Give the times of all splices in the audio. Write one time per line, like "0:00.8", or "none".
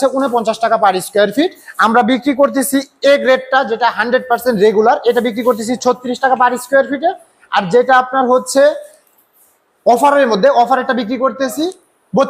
none